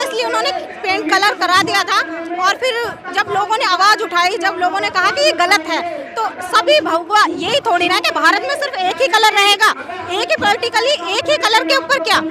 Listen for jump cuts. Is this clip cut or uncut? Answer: uncut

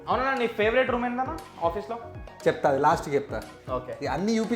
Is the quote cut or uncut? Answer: uncut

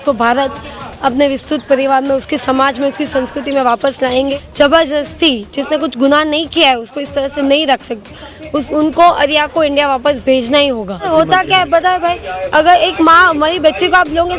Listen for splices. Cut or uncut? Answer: cut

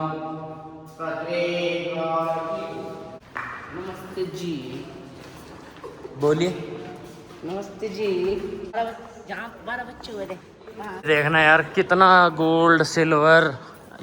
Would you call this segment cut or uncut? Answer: cut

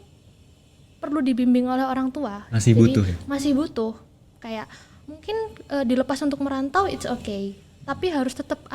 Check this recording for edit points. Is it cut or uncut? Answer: uncut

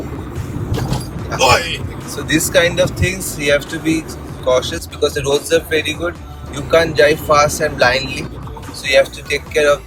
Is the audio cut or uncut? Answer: uncut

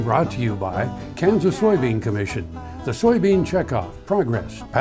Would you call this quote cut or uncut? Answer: uncut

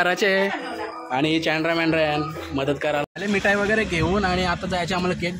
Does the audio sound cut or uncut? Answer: cut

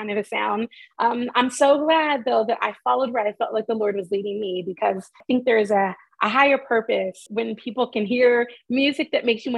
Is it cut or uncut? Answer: cut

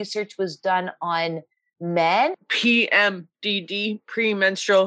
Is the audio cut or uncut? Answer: cut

